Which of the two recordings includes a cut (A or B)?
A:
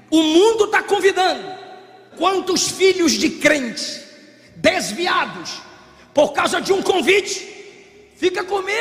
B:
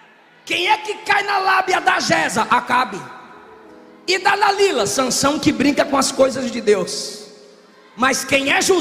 A